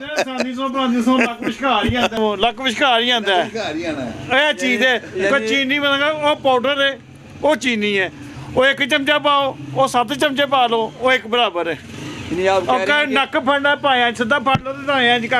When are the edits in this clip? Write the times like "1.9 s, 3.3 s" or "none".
2.2 s